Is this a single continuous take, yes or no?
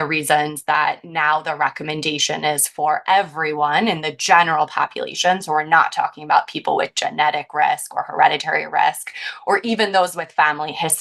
yes